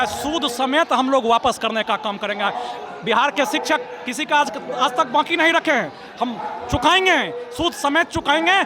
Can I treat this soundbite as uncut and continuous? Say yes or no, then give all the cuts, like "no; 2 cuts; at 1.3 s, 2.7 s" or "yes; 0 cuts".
yes; 0 cuts